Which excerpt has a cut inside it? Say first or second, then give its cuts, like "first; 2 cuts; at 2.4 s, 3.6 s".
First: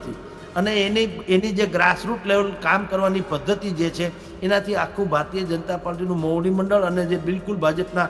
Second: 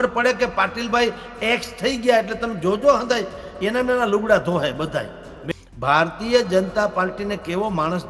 second; 1 cut; at 5.3 s